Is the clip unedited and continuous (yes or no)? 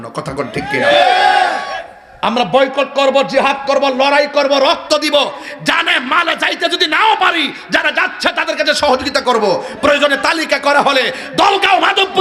yes